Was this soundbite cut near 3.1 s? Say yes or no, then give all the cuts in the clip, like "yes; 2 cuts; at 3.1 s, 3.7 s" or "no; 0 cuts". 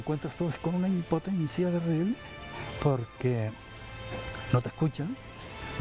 no; 0 cuts